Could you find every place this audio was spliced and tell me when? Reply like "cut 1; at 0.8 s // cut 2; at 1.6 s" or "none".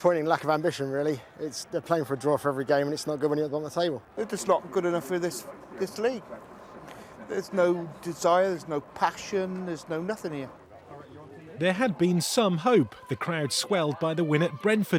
none